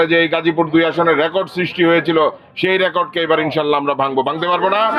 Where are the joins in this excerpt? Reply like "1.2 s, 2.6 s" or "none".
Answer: none